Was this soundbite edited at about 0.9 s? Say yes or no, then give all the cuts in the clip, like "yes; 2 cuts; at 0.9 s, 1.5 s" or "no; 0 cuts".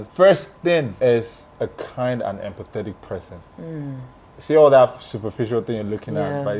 yes; 1 cut; at 0.9 s